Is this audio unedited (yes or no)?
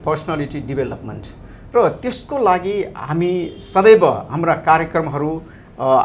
yes